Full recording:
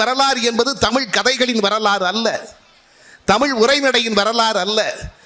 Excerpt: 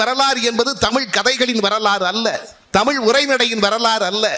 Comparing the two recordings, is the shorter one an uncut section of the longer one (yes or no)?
no